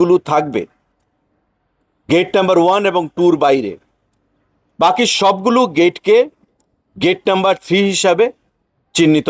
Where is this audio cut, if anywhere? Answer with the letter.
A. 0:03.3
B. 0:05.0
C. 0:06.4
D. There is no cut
D